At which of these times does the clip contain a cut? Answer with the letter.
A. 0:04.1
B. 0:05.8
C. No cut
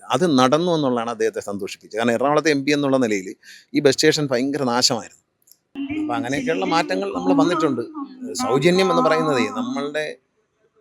B